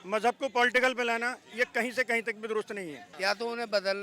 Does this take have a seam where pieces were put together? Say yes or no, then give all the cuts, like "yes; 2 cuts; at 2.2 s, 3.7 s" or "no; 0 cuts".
yes; 1 cut; at 3.0 s